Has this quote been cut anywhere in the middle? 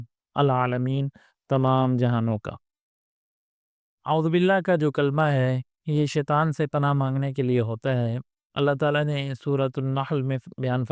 no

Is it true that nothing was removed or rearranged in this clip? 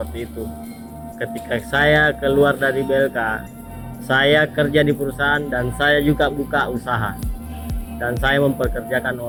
yes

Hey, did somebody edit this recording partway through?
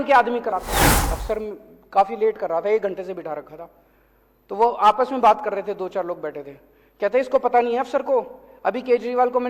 yes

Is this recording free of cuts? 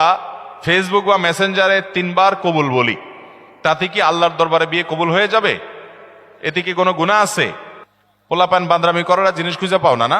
yes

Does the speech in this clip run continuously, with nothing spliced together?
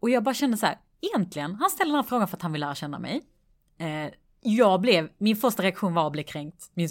yes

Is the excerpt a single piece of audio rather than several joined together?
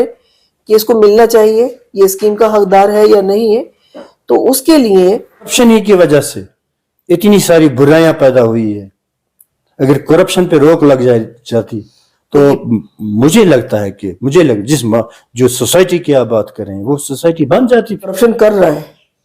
no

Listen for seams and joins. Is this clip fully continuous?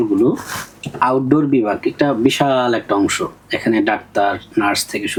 yes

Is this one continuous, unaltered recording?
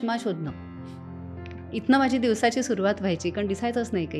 yes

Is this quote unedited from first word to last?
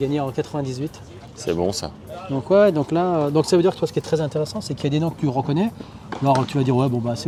yes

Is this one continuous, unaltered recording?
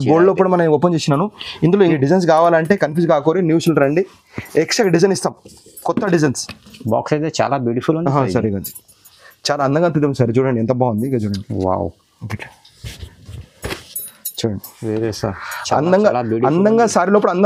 no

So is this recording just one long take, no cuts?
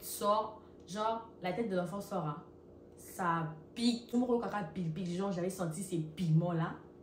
no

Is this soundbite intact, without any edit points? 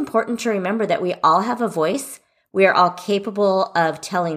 yes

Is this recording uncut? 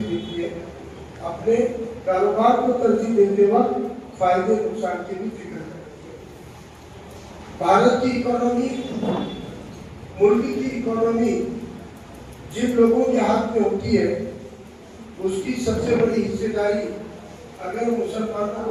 yes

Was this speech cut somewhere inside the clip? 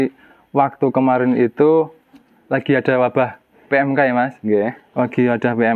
no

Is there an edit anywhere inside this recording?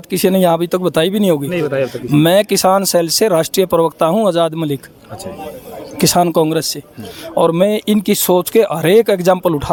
no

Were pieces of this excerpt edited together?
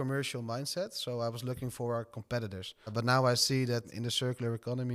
no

